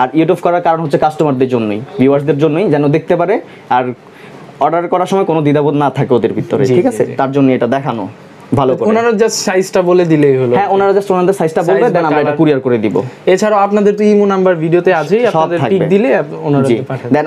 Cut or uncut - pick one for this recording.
uncut